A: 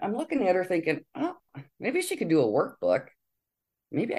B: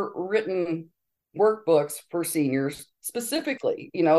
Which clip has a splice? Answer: B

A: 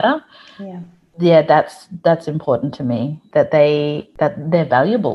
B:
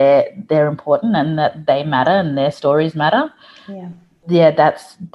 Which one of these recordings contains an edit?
A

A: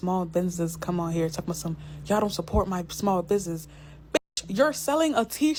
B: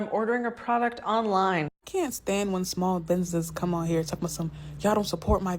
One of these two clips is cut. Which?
B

